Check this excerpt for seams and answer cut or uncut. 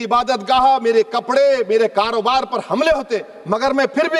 uncut